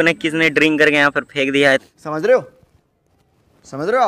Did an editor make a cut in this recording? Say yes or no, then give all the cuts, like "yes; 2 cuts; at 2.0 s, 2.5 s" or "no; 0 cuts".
no; 0 cuts